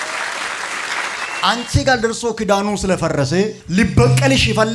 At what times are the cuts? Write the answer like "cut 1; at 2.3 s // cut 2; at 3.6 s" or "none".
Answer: cut 1; at 1.3 s // cut 2; at 3.6 s